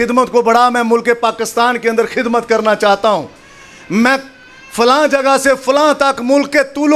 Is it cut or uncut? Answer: uncut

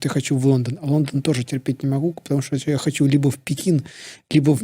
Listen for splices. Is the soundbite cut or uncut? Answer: uncut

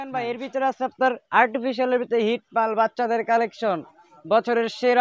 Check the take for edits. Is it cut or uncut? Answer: uncut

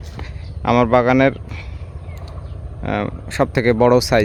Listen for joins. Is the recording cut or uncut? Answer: uncut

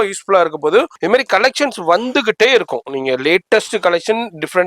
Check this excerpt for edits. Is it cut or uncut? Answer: cut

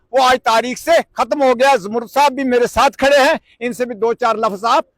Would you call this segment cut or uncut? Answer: uncut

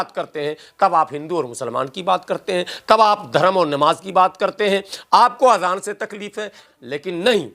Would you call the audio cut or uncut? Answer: cut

